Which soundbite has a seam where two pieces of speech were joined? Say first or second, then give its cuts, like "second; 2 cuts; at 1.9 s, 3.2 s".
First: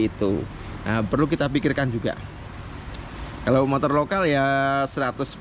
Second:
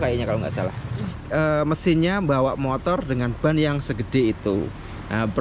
second; 1 cut; at 1.2 s